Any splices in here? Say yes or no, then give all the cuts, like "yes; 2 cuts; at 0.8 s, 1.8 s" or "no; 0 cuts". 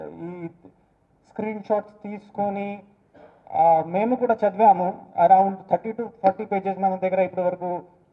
no; 0 cuts